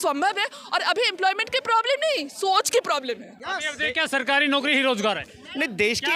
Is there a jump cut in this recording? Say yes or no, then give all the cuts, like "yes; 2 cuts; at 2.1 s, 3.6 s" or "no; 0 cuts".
no; 0 cuts